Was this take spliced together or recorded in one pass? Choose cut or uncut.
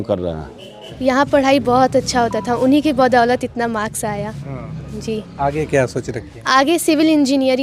cut